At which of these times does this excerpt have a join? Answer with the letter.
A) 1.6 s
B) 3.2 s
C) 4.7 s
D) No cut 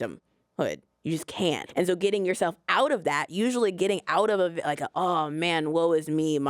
A